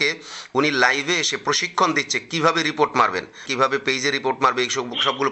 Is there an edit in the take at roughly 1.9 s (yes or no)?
no